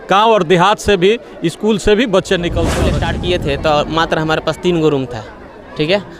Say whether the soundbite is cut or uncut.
cut